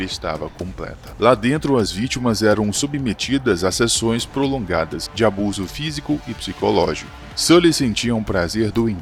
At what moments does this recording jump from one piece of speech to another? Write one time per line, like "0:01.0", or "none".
none